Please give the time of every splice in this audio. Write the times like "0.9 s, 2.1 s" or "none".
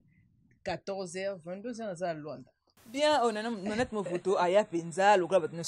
none